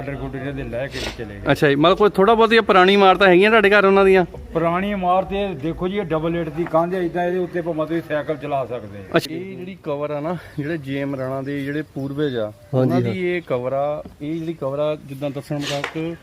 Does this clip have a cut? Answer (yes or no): yes